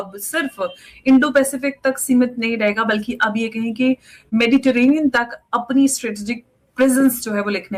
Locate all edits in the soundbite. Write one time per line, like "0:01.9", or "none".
none